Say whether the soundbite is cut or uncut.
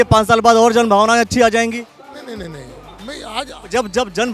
uncut